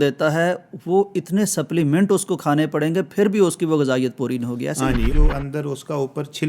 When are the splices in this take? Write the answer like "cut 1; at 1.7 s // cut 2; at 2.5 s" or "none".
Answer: cut 1; at 5.1 s